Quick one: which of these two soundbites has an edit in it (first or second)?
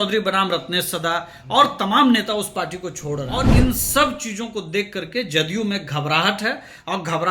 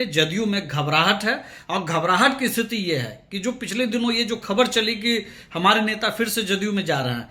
first